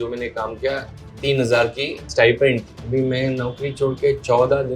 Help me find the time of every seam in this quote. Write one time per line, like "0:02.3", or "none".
0:02.7